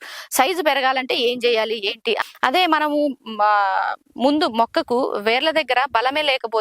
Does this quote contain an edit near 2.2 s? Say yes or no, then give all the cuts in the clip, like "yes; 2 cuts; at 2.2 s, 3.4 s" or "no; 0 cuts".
yes; 1 cut; at 2.2 s